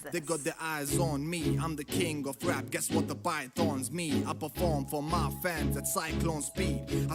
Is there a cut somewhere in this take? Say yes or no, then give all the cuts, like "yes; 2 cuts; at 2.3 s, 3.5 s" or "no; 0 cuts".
no; 0 cuts